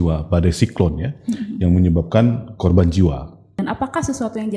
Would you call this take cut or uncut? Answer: cut